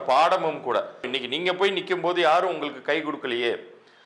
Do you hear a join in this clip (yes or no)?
yes